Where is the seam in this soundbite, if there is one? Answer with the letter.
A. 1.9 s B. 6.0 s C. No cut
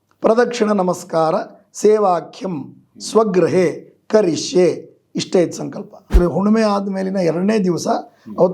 B